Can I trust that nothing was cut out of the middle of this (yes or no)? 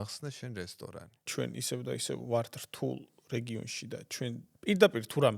no